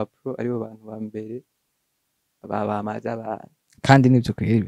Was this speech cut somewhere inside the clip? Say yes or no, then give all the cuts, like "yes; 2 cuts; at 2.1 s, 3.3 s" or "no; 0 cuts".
no; 0 cuts